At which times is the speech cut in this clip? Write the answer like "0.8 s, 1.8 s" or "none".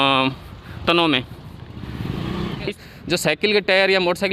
2.7 s